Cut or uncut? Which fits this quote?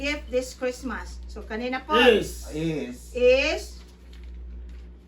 uncut